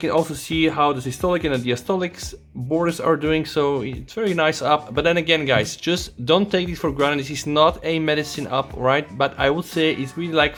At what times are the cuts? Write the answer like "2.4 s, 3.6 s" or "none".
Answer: none